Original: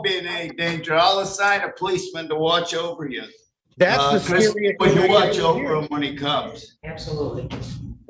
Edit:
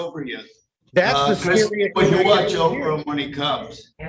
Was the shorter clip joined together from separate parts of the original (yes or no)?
no